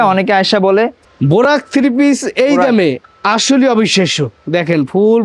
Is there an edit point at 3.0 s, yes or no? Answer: no